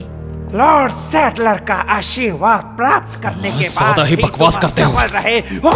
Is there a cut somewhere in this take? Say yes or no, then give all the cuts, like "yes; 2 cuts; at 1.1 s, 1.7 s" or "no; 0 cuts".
no; 0 cuts